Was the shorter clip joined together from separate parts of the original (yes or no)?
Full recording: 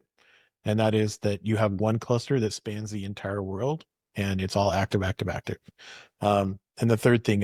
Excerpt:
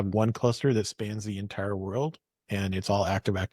no